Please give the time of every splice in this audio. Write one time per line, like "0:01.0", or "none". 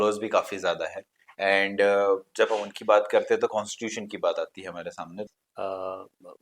0:05.3